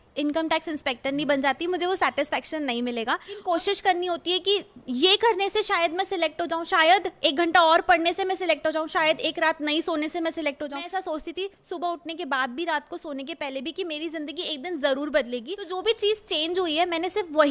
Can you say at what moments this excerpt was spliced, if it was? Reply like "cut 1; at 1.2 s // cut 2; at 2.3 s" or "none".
cut 1; at 3.4 s // cut 2; at 10.8 s // cut 3; at 15.7 s